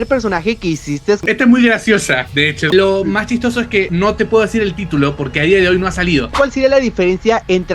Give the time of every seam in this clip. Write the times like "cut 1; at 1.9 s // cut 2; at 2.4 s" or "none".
cut 1; at 1.2 s // cut 2; at 2.7 s // cut 3; at 6.4 s